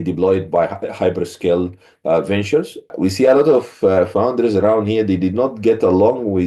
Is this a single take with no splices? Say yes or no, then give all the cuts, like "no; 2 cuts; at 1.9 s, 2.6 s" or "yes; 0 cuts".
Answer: no; 1 cut; at 2.9 s